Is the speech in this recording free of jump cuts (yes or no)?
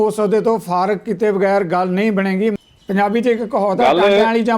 no